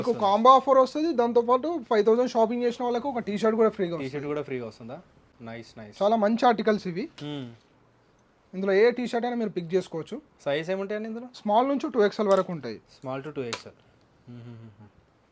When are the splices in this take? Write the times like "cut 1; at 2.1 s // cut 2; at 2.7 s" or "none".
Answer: none